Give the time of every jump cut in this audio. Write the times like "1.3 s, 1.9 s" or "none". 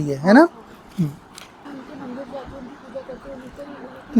1.6 s